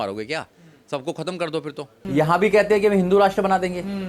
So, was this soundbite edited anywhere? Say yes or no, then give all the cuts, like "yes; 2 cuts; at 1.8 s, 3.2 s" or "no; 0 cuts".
yes; 1 cut; at 2.0 s